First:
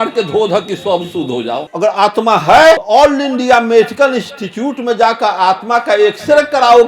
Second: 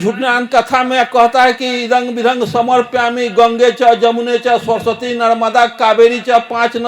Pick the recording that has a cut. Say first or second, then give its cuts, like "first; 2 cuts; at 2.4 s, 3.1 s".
first; 2 cuts; at 1.7 s, 2.8 s